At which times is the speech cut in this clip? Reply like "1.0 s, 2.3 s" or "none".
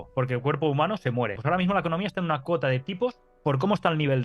1.4 s